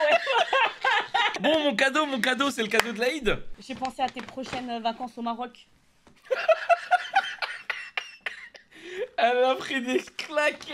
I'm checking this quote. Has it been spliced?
no; 0 cuts

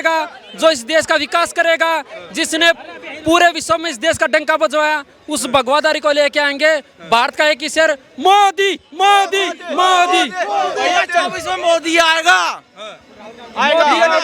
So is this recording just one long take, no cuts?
yes; 0 cuts

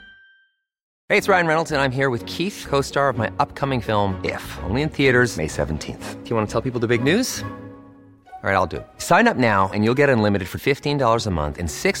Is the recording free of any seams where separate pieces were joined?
no; 1 cut; at 0.9 s

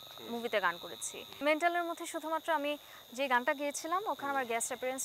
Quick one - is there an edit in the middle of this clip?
yes; 1 cut; at 1.4 s

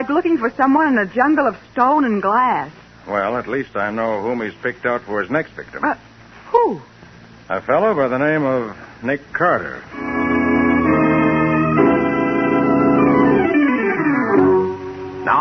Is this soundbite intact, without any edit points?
no; 1 cut; at 11.1 s

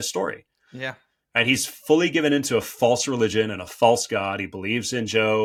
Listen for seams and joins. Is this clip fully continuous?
yes; 0 cuts

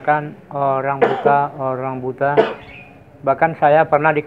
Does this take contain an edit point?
no; 0 cuts

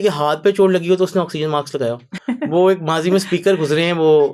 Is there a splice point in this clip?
yes; 1 cut; at 2.1 s

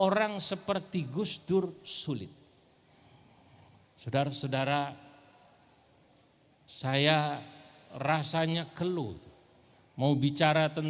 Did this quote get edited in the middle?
yes; 1 cut; at 1.1 s

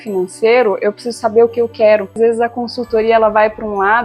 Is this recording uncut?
no; 1 cut; at 2.2 s

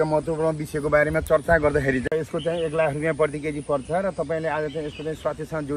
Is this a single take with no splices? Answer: no; 1 cut; at 2.1 s

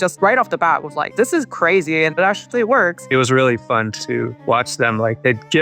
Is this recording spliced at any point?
yes; 1 cut; at 3.0 s

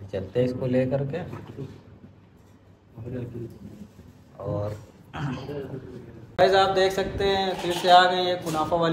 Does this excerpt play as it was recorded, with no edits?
no; 1 cut; at 6.2 s

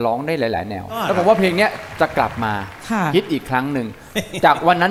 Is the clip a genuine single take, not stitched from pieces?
no; 1 cut; at 1.0 s

